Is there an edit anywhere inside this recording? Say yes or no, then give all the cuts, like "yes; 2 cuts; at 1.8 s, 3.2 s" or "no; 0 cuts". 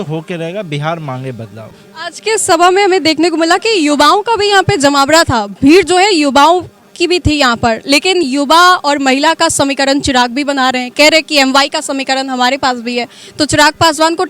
no; 0 cuts